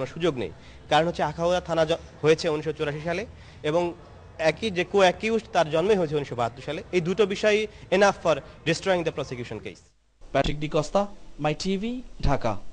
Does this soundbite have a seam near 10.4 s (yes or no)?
no